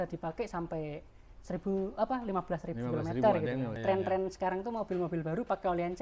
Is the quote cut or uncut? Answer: cut